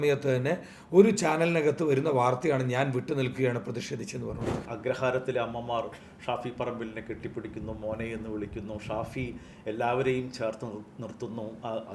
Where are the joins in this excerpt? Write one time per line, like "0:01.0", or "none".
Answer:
0:04.7